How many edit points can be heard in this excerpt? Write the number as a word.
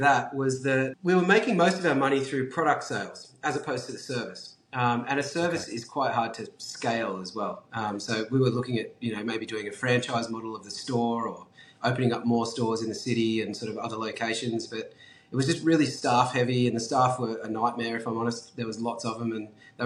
one